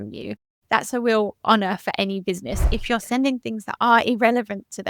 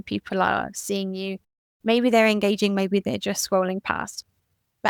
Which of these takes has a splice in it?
first; 1 cut; at 2.6 s

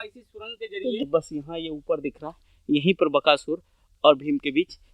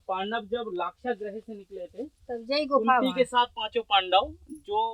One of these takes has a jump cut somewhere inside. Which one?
first; 1 cut; at 1.0 s

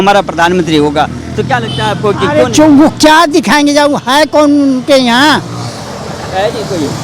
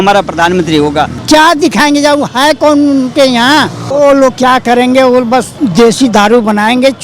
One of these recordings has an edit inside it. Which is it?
second; 3 cuts; at 1.2 s, 3.9 s, 5.5 s

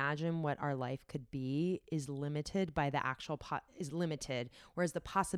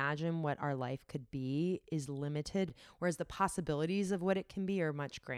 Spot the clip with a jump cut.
second; 1 cut; at 2.7 s

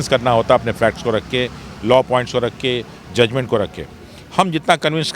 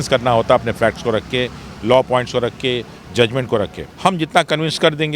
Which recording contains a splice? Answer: second; 1 cut; at 3.8 s

